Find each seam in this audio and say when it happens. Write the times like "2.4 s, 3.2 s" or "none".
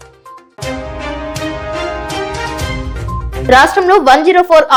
none